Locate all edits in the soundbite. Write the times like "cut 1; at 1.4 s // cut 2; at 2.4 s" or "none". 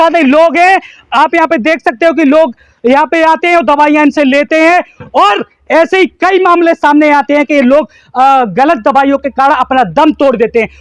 none